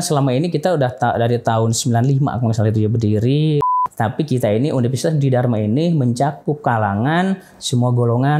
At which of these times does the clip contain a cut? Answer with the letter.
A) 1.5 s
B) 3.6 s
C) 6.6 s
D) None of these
B